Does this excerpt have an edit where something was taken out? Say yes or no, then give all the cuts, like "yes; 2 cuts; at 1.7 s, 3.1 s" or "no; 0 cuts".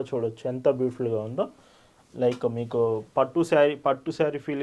no; 0 cuts